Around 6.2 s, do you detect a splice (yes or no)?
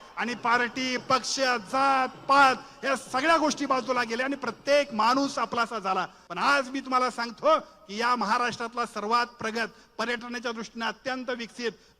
yes